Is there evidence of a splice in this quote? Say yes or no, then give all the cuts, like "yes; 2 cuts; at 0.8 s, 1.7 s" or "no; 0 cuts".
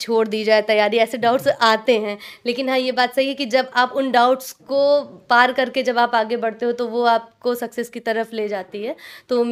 no; 0 cuts